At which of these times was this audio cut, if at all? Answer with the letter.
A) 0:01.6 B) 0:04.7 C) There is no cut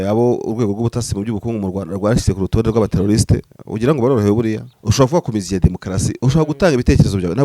B